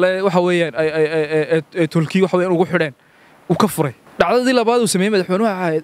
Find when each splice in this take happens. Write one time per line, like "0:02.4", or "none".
0:04.0